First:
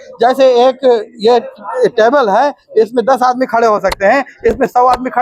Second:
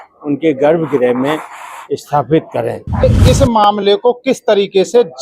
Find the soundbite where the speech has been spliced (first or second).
second